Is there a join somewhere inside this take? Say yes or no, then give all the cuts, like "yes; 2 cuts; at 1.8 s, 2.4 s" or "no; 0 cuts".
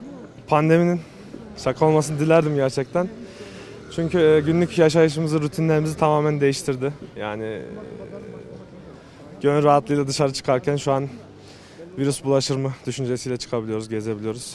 no; 0 cuts